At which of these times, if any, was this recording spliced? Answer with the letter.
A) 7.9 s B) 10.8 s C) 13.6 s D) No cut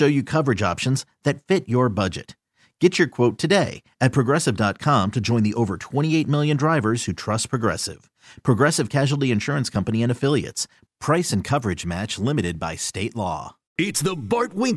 C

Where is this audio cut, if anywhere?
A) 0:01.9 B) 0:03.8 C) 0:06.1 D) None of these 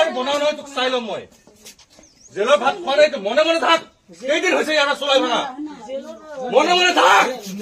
D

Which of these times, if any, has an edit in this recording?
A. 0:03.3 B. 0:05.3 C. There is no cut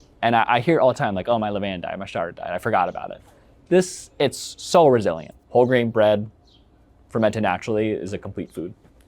B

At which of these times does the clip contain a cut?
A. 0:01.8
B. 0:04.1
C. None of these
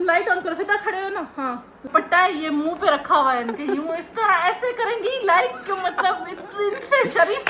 A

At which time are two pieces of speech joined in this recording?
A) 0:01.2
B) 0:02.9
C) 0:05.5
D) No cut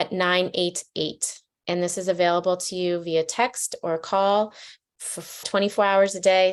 C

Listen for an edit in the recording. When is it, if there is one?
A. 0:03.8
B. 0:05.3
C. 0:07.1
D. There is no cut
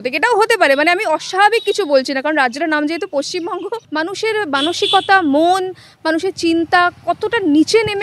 A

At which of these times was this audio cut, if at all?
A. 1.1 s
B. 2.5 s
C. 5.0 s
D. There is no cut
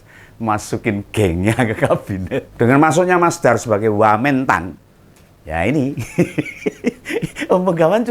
B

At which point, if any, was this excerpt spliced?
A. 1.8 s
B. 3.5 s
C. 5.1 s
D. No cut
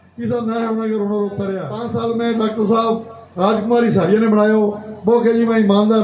A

